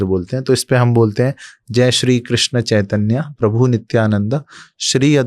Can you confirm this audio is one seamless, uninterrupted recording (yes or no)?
yes